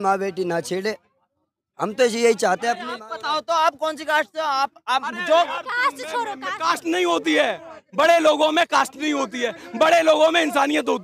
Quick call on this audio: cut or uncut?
cut